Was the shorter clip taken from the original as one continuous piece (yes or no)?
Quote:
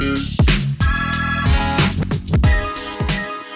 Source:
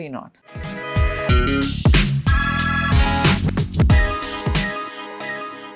yes